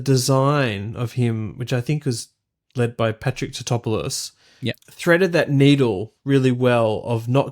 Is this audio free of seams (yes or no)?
no